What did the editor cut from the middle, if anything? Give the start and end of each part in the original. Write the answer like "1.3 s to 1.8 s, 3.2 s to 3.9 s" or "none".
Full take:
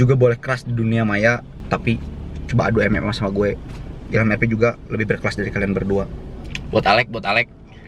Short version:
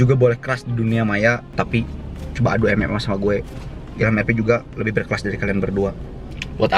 1.4 s to 1.6 s